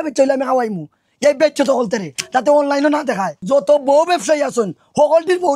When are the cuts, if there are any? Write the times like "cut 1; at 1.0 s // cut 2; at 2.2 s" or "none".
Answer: cut 1; at 3.3 s